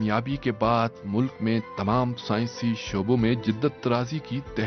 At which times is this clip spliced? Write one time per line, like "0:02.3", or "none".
0:03.1